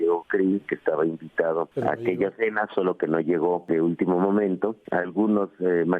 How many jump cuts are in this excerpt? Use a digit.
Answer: 3